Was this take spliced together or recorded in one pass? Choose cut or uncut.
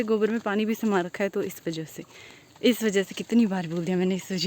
uncut